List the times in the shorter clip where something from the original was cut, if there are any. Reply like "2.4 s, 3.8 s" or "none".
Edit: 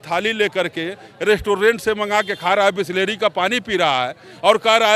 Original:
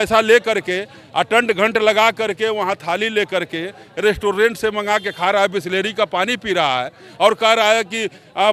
none

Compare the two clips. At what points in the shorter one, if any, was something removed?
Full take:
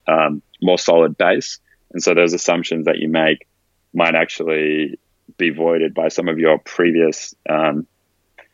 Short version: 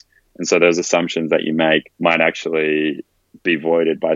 1.9 s

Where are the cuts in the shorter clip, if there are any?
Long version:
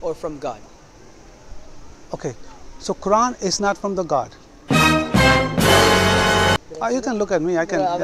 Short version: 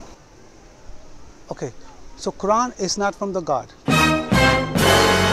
3.7 s

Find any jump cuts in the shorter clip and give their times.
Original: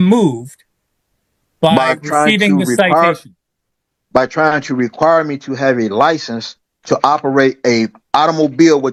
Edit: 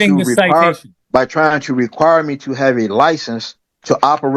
0.9 s

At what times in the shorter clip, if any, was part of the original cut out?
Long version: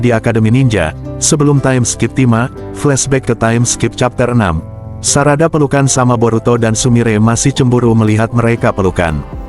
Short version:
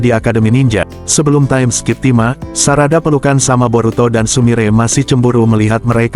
1.0 s, 2.5 s

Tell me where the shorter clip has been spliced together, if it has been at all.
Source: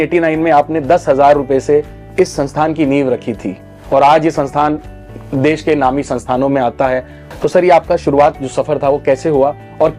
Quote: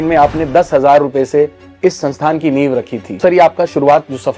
3.2 s

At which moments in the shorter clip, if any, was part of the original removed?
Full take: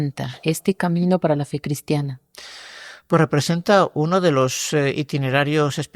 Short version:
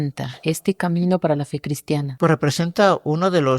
2.1 s

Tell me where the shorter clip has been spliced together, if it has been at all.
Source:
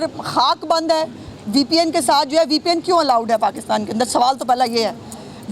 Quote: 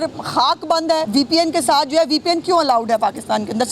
1.1 s

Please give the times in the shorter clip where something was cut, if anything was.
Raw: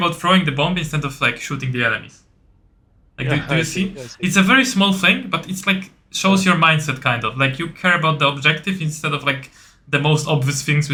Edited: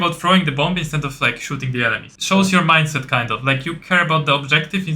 2.1 s

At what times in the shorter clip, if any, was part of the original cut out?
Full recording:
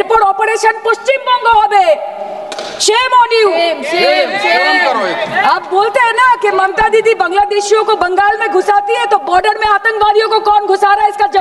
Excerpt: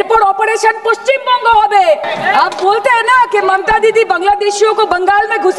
2.1 s

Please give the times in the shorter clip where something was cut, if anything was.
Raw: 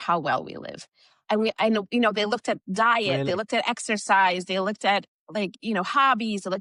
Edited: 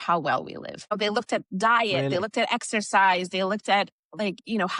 1.0 s

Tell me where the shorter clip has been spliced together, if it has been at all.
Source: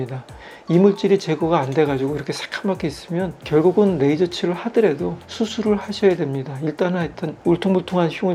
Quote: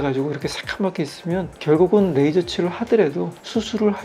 none

